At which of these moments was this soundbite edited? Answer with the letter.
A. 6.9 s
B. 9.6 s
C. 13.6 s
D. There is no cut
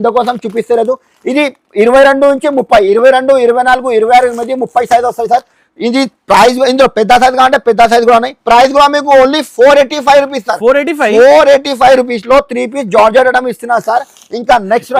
D